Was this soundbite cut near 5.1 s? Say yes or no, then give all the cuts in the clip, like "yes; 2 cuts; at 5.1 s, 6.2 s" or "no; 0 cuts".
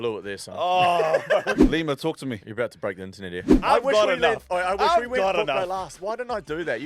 no; 2 cuts; at 1.6 s, 3.5 s